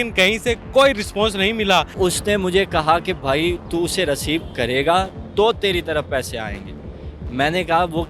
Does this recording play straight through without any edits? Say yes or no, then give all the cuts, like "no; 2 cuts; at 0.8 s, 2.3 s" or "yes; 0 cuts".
no; 1 cut; at 1.9 s